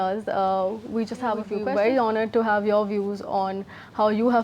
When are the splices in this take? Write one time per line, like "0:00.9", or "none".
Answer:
0:01.5

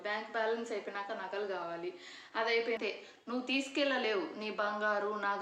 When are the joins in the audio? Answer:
0:02.8

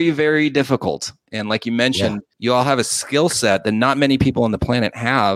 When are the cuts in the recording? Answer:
0:02.3

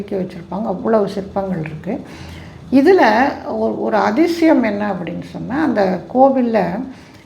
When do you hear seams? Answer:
none

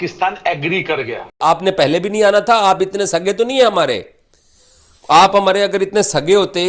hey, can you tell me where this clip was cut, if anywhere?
0:01.3

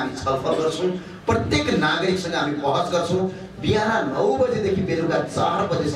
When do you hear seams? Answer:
none

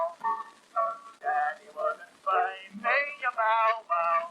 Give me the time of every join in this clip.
0:01.1

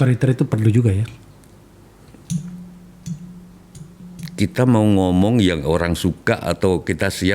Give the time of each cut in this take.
0:04.0

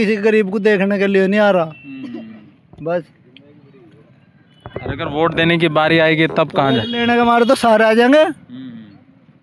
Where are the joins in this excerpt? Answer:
none

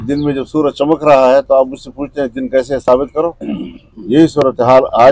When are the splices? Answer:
none

